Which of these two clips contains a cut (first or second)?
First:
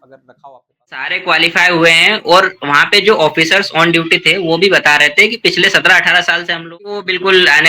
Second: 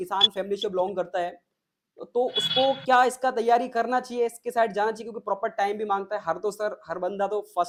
first